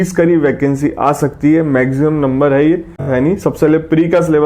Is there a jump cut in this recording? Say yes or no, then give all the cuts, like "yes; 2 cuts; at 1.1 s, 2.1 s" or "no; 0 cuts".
yes; 1 cut; at 3.1 s